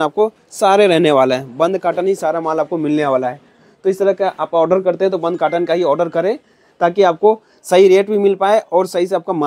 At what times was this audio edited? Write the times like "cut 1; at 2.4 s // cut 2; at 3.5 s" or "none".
none